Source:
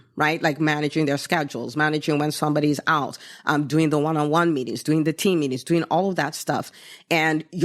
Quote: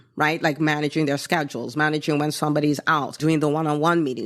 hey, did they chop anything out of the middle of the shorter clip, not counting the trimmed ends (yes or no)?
yes